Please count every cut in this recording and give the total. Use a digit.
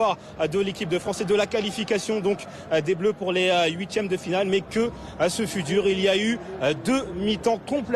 0